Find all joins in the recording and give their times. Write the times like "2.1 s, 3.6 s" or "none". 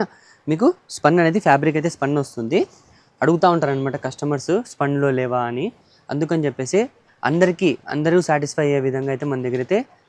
none